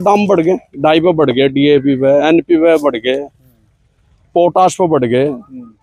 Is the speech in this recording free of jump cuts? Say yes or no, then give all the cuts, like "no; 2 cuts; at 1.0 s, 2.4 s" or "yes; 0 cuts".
yes; 0 cuts